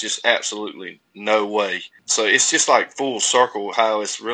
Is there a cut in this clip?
yes; 1 cut; at 2.0 s

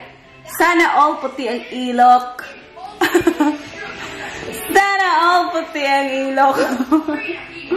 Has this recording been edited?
no; 0 cuts

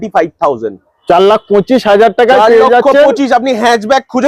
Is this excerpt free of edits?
yes; 0 cuts

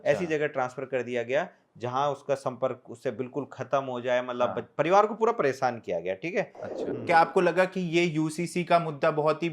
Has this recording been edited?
yes; 1 cut; at 6.9 s

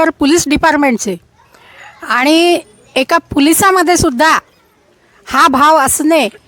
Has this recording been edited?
no; 0 cuts

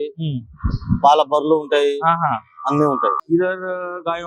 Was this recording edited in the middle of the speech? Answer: yes; 1 cut; at 3.2 s

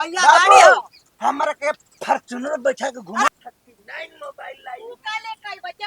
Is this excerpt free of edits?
no; 1 cut; at 3.3 s

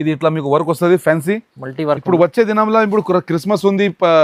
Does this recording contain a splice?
no; 0 cuts

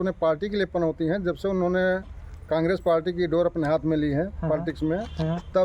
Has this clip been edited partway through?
no; 0 cuts

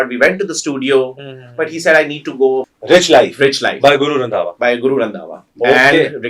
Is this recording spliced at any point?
yes; 1 cut; at 2.7 s

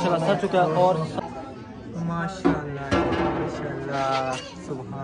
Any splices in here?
yes; 1 cut; at 1.1 s

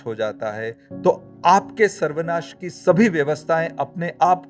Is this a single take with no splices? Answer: yes; 0 cuts

